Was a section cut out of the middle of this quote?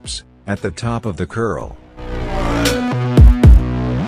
yes; 1 cut; at 2.2 s

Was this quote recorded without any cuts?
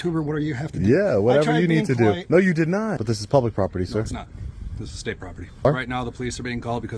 no; 2 cuts; at 3.1 s, 5.7 s

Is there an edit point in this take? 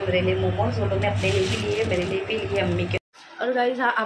yes; 1 cut; at 3.0 s

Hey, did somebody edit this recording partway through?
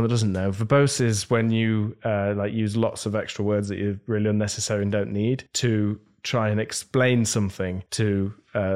yes; 2 cuts; at 5.5 s, 7.8 s

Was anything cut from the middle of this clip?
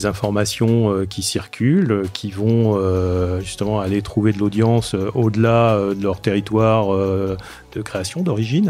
yes; 1 cut; at 1.2 s

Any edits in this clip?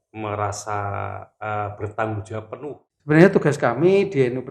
yes; 1 cut; at 2.7 s

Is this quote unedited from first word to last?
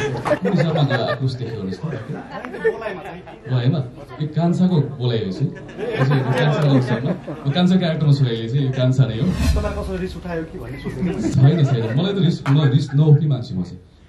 no; 1 cut; at 9.5 s

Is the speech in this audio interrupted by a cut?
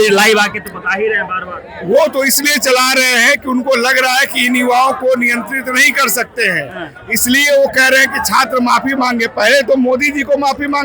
no; 0 cuts

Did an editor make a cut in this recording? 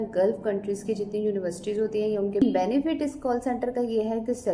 yes; 1 cut; at 2.4 s

